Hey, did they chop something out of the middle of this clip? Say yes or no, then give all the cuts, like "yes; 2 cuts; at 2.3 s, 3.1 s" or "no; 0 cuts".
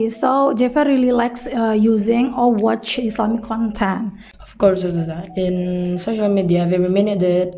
yes; 1 cut; at 4.3 s